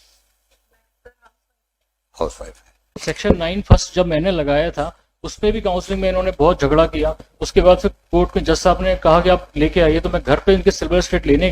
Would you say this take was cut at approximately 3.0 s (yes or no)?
yes